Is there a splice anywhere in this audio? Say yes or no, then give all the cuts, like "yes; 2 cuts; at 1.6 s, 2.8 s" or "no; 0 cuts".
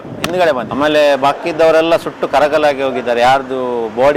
no; 0 cuts